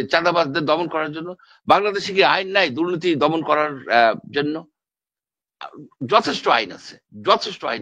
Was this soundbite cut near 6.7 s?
no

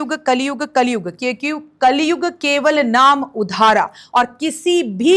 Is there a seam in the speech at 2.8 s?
no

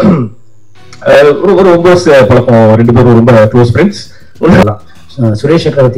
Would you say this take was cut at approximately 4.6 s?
yes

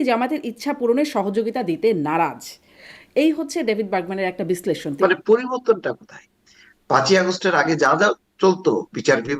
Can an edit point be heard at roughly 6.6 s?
no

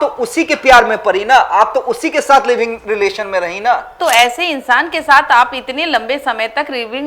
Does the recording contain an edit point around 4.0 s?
yes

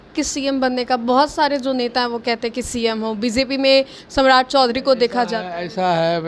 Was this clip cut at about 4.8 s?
no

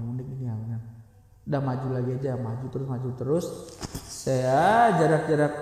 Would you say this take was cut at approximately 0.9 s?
no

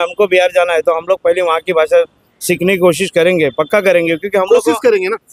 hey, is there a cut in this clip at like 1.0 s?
yes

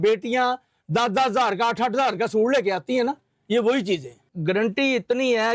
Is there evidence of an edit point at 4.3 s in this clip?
yes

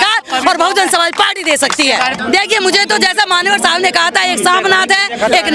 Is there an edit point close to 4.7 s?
no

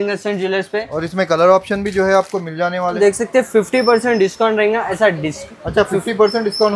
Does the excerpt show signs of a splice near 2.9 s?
yes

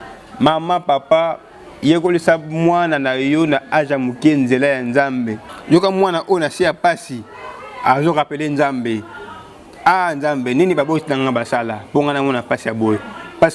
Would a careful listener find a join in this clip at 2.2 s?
no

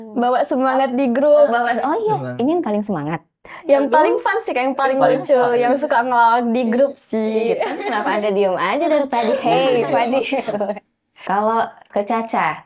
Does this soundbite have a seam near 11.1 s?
yes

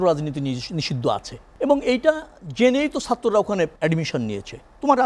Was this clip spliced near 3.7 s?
yes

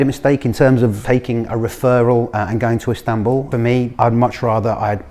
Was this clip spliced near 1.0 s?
yes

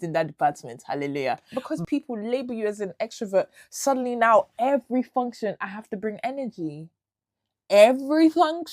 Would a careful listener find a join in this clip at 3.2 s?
no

